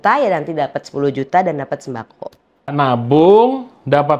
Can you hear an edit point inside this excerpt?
yes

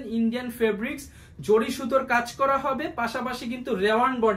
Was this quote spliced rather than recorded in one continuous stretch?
no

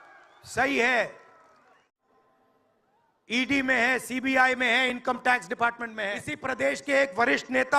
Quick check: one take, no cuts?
no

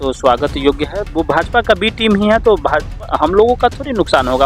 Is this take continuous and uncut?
no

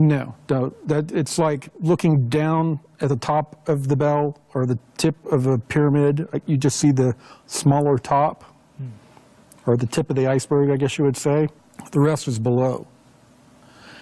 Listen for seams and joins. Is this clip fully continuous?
yes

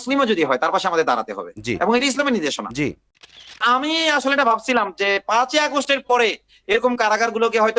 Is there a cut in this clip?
yes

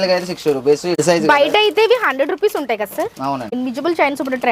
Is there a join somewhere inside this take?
yes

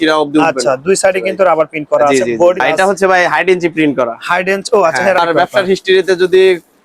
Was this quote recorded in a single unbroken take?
no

